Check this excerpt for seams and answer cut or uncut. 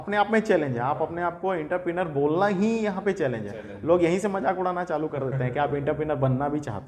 uncut